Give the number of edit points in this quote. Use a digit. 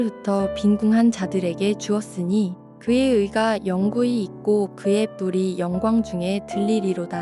0